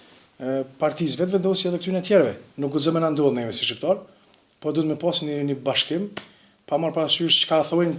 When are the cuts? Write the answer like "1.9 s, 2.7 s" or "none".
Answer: 2.5 s